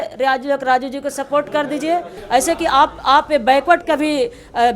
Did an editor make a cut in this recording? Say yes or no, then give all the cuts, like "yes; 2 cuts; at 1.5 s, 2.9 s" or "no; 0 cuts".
yes; 1 cut; at 2.1 s